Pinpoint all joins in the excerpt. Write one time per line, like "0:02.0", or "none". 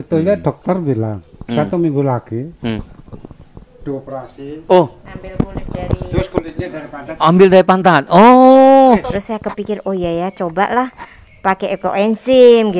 0:09.1

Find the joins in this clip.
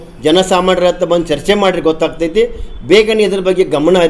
none

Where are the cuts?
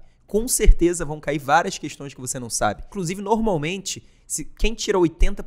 0:02.9

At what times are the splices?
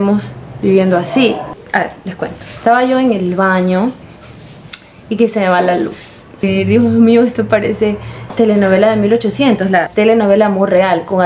0:01.5
0:06.4
0:08.2
0:09.9

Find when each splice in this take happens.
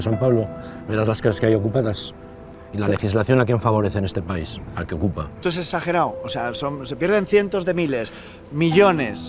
0:05.4

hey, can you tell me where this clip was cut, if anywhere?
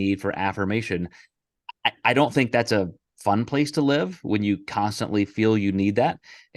none

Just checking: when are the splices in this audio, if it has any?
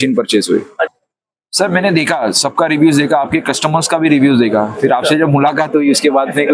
0:00.9

